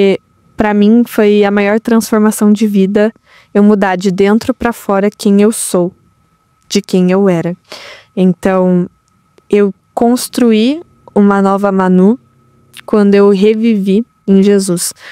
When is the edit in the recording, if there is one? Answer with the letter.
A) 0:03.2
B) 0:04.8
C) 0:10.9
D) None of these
D